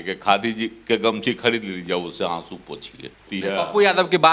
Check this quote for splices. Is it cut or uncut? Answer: cut